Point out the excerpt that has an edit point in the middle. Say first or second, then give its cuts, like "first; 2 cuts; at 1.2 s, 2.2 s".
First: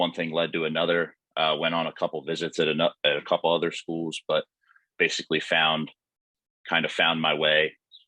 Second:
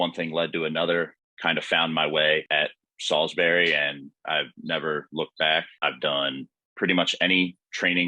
second; 3 cuts; at 1.2 s, 2.5 s, 5.7 s